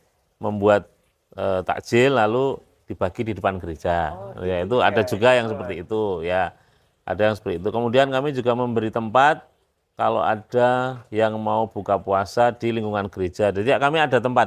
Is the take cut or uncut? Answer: uncut